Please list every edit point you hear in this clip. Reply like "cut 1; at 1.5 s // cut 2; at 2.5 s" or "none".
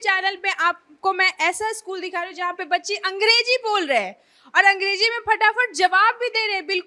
none

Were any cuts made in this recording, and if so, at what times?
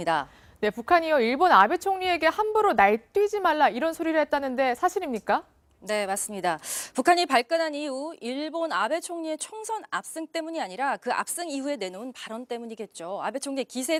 none

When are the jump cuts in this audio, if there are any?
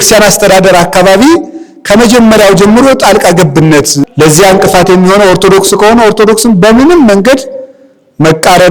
cut 1; at 4.0 s

